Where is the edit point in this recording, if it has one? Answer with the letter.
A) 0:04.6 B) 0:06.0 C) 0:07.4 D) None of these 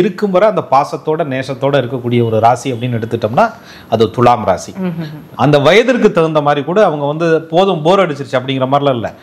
D